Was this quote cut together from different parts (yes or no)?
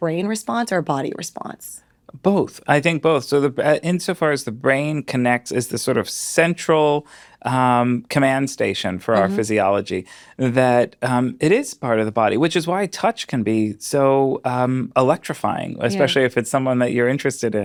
no